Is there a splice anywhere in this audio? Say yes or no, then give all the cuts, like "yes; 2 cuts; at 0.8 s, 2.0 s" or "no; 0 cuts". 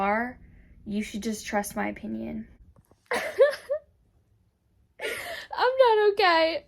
yes; 1 cut; at 3.0 s